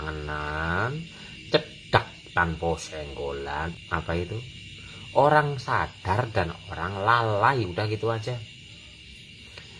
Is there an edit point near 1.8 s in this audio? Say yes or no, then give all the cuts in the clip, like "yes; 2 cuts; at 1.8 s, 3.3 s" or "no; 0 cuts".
no; 1 cut; at 3.7 s